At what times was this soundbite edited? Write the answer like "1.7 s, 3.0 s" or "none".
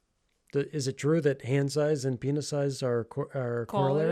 none